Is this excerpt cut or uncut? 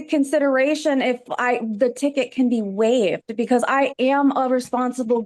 uncut